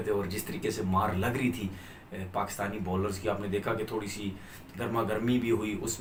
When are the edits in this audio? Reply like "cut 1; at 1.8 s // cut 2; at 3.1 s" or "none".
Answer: none